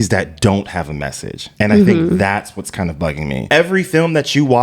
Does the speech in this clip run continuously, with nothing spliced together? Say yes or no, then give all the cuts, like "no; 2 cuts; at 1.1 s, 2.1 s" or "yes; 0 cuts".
no; 1 cut; at 3.4 s